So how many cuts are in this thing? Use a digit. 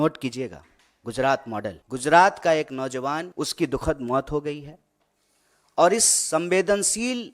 2